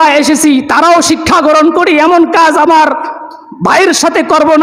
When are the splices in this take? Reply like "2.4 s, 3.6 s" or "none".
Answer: none